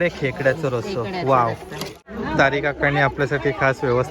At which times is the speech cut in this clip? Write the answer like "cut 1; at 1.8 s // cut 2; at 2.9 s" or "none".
cut 1; at 2.1 s